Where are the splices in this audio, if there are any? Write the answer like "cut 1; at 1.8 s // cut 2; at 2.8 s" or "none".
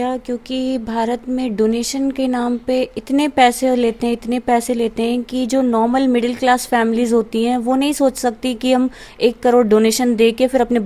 none